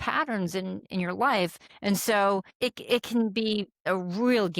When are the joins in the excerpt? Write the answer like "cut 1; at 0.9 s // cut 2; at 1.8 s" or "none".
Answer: cut 1; at 1.7 s // cut 2; at 2.5 s // cut 3; at 3.8 s